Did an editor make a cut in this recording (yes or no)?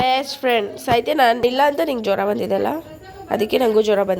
yes